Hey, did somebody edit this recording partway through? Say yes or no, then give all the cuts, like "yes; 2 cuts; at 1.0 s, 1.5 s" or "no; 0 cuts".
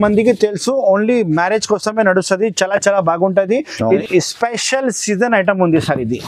yes; 1 cut; at 4.0 s